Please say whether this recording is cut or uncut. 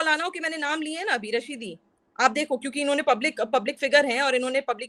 uncut